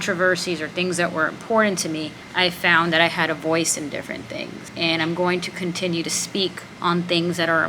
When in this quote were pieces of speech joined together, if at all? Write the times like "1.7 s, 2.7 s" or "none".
2.2 s, 4.6 s, 6.3 s

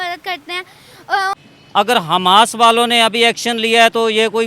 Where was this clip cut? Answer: 1.4 s

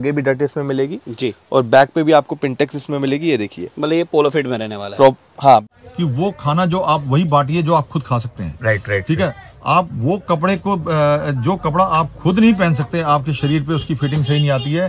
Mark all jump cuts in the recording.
5.6 s

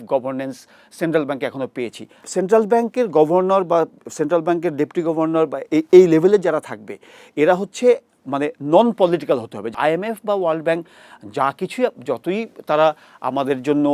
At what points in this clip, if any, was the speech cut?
2.2 s, 9.6 s

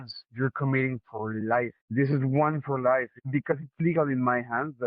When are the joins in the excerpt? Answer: 1.8 s, 3.2 s

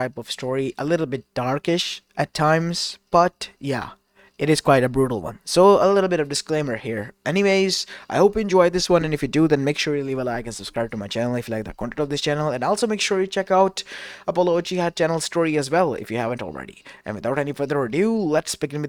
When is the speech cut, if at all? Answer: none

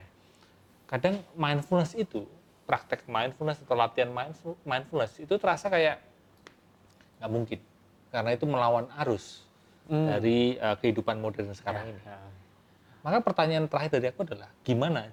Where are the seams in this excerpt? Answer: none

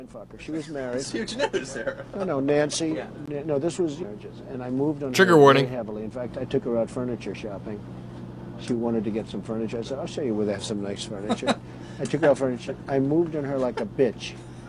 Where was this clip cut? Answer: none

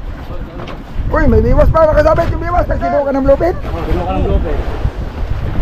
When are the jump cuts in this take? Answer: 2.7 s

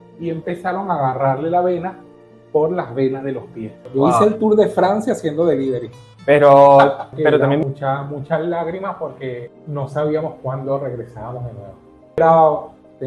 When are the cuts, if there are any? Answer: 3.9 s, 7.6 s, 12.2 s

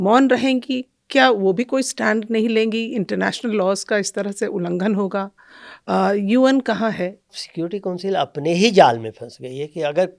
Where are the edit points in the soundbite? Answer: 7.4 s

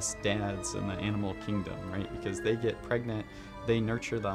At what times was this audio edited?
none

